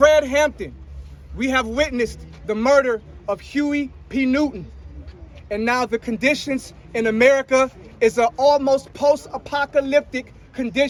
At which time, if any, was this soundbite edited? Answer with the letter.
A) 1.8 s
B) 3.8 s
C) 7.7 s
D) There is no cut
D